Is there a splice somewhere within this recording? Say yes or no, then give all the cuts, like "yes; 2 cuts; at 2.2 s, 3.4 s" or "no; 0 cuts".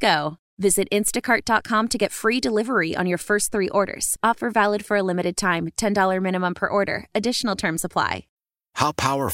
yes; 1 cut; at 8.4 s